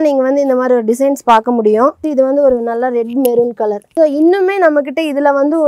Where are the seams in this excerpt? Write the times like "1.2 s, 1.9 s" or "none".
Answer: 2.0 s, 3.8 s